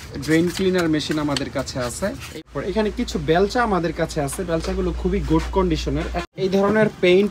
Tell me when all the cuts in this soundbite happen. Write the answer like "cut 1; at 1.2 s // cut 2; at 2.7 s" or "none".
cut 1; at 2.2 s // cut 2; at 6.2 s